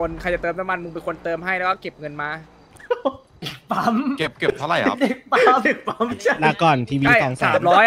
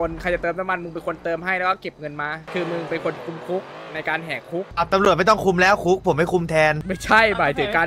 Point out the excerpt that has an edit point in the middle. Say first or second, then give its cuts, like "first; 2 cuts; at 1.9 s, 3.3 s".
second; 3 cuts; at 2.5 s, 4.7 s, 6.9 s